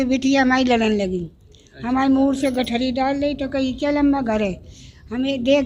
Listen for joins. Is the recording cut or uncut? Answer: uncut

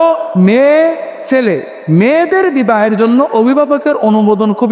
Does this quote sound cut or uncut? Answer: uncut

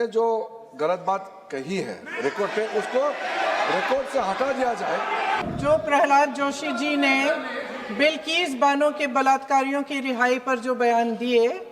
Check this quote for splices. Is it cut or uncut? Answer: cut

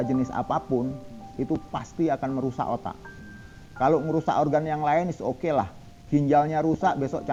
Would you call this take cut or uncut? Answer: uncut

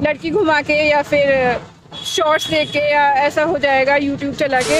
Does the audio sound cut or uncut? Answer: uncut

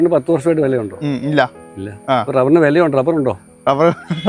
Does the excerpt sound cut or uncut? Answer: uncut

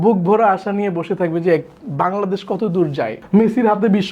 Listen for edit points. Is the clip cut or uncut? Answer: cut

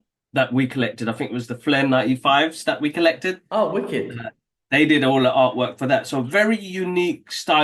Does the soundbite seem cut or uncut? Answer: uncut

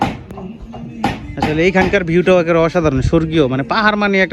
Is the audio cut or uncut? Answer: uncut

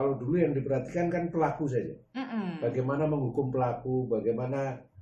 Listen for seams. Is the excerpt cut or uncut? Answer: uncut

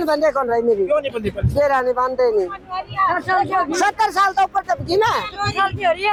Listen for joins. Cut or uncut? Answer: uncut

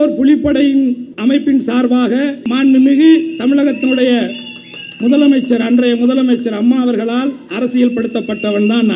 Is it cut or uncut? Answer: cut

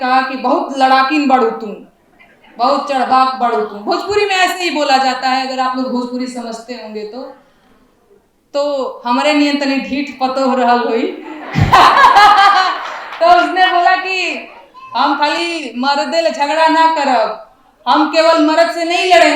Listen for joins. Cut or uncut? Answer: uncut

